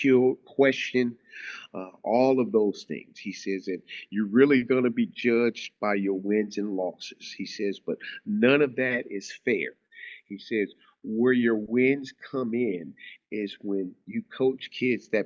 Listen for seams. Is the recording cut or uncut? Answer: uncut